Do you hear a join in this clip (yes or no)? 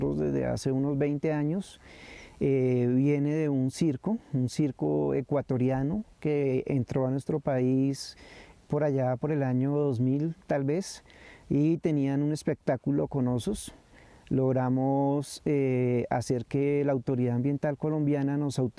no